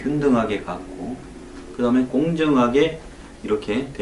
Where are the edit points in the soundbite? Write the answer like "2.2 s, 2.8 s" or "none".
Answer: 2.3 s